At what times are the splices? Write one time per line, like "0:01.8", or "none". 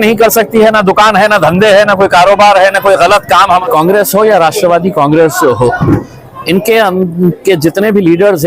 0:03.6